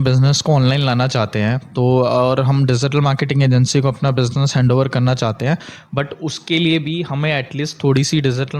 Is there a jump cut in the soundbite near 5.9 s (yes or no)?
no